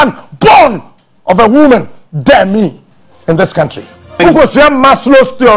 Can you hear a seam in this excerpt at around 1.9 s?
no; 1 cut; at 4.0 s

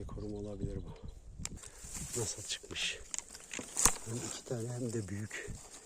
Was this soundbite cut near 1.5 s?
yes; 1 cut; at 1.5 s

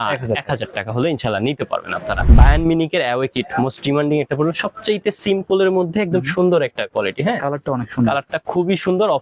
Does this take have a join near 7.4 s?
no; 1 cut; at 2.2 s

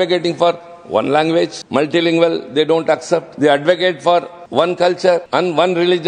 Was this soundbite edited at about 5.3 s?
yes; 4 cuts; at 1.6 s, 3.3 s, 4.4 s, 5.3 s

